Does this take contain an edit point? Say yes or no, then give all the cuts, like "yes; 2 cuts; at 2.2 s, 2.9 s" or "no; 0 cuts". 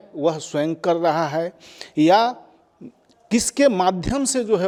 no; 0 cuts